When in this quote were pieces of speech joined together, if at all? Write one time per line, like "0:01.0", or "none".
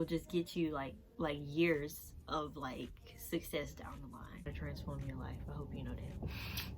0:01.0
0:04.6